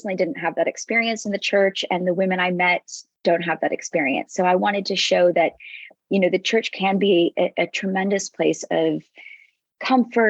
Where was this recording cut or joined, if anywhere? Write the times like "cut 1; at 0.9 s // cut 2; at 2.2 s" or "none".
none